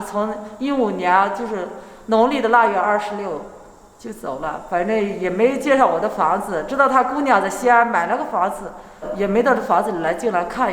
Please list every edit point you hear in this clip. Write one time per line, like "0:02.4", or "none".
0:09.1